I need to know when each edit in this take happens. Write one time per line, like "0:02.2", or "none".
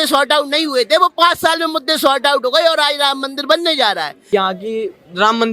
0:04.2